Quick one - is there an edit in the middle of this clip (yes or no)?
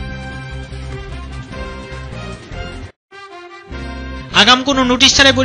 no